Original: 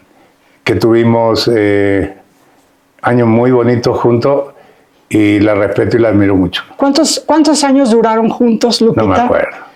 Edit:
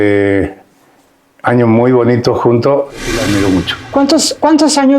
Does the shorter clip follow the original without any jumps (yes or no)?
no